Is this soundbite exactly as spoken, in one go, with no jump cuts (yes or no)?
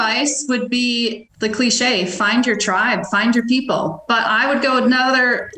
no